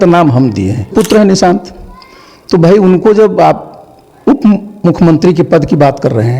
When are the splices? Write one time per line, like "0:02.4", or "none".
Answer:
0:00.9